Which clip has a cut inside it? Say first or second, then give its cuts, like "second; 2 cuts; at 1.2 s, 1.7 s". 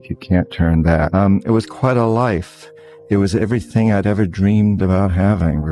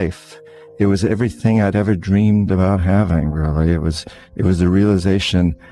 first; 1 cut; at 1.1 s